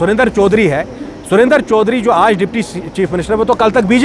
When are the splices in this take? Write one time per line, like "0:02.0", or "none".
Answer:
none